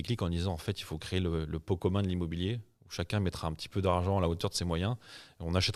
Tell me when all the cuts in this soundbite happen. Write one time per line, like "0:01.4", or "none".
none